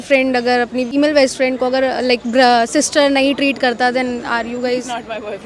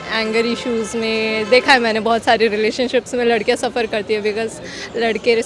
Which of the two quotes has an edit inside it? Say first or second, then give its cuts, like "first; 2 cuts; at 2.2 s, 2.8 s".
first; 1 cut; at 0.9 s